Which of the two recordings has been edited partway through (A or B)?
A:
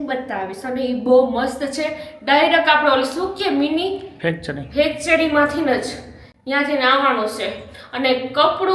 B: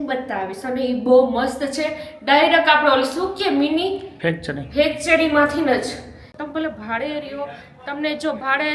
B